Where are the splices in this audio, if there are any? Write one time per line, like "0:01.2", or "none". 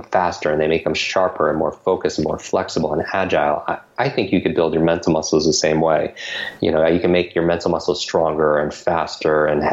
none

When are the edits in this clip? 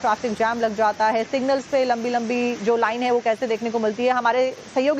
0:01.1

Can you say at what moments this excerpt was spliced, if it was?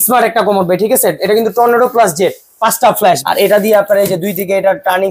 0:03.2

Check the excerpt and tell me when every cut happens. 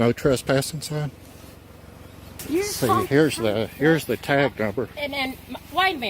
0:02.4

